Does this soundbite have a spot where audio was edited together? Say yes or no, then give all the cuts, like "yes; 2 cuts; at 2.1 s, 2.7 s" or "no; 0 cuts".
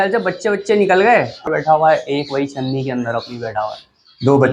yes; 1 cut; at 1.5 s